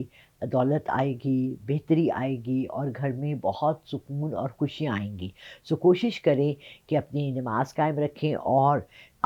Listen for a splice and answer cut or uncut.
uncut